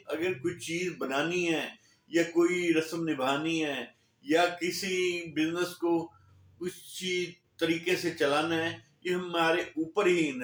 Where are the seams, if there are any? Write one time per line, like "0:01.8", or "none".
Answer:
none